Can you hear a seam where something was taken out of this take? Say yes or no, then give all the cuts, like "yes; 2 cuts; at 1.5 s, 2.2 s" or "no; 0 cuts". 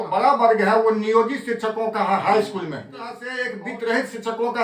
yes; 1 cut; at 3.2 s